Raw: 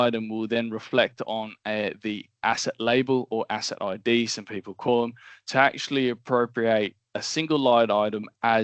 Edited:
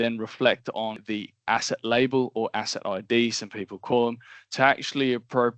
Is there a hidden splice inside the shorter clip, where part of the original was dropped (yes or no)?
yes